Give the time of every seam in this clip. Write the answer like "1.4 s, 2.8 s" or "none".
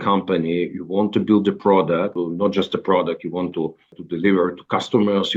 2.1 s, 4.0 s

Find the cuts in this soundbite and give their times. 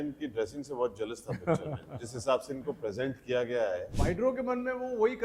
3.9 s

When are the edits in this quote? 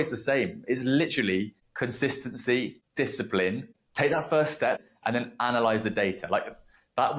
1.6 s, 2.8 s, 3.7 s, 4.8 s

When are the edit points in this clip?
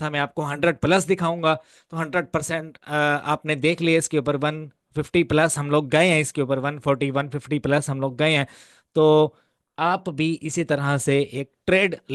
none

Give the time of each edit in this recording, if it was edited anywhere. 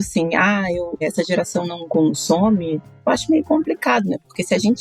1.0 s, 2.9 s

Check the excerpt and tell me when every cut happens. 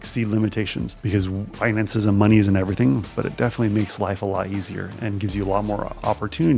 none

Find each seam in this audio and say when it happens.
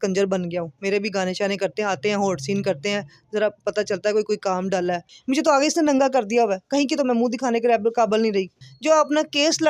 5.1 s, 8.5 s

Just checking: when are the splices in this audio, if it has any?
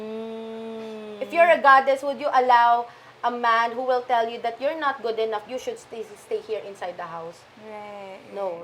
5.5 s

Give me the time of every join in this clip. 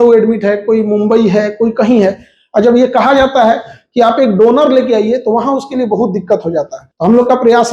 6.8 s

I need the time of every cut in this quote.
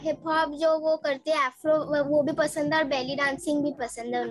none

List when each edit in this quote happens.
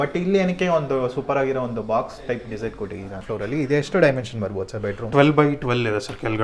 3.2 s

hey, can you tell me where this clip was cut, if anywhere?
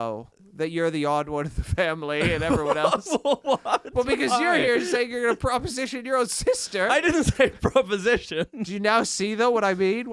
8.6 s

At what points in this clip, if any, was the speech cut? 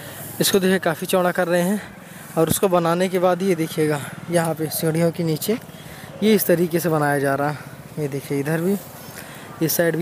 none

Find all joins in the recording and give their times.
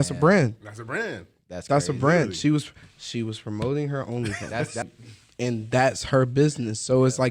4.9 s

